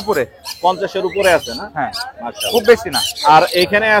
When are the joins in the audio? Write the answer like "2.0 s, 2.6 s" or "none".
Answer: none